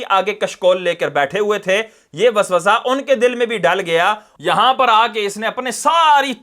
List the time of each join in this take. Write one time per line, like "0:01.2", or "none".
0:04.3